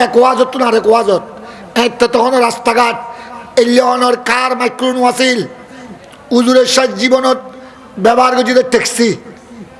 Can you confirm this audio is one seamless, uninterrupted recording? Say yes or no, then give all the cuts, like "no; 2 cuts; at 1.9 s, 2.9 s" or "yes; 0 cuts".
yes; 0 cuts